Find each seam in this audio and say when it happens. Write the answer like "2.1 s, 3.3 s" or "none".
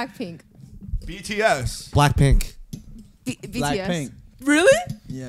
none